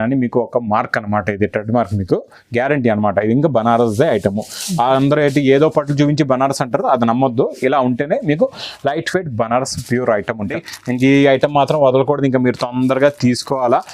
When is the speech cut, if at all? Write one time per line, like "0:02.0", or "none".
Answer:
0:10.6